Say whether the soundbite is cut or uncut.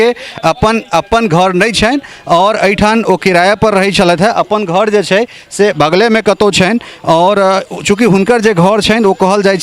uncut